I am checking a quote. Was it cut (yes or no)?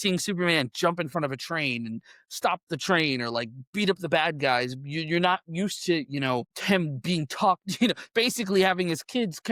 no